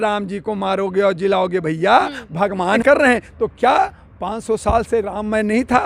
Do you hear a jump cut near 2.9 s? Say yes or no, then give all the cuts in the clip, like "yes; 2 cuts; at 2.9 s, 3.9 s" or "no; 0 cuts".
yes; 1 cut; at 2.9 s